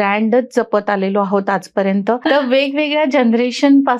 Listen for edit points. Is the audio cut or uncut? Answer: cut